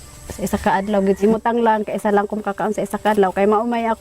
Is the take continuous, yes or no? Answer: no